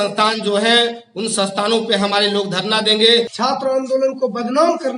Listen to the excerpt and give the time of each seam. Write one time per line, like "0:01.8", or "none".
0:03.3